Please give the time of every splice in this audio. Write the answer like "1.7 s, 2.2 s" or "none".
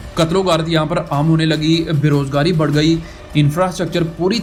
none